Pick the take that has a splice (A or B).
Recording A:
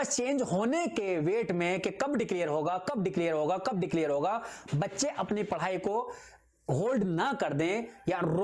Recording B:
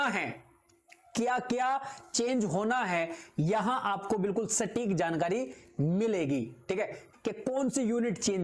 B